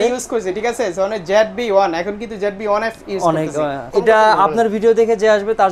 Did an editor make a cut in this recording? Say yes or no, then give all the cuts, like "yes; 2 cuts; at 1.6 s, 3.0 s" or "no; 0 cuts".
yes; 1 cut; at 3.9 s